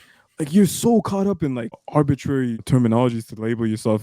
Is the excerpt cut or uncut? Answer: cut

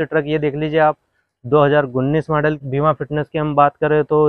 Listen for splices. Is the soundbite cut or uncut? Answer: cut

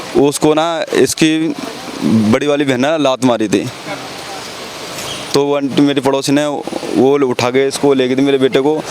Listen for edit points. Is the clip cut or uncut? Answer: uncut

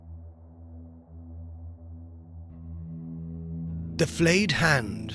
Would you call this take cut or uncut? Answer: cut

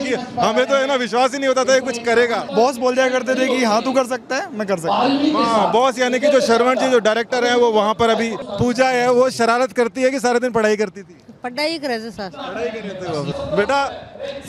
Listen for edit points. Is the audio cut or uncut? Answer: cut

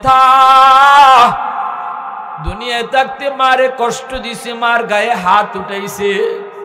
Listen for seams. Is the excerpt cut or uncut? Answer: uncut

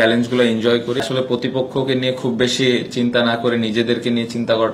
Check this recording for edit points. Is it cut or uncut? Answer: cut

